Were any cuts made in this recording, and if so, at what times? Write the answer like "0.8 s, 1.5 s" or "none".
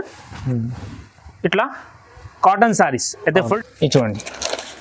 3.5 s